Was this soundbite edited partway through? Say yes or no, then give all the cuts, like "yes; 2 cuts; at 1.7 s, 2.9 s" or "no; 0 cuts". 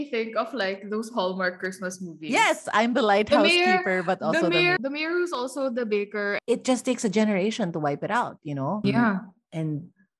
yes; 3 cuts; at 2.6 s, 4.8 s, 6.4 s